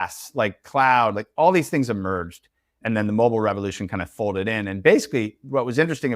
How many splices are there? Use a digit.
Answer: 1